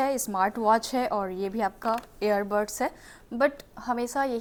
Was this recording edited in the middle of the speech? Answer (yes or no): no